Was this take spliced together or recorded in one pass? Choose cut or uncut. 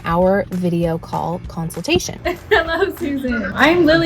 cut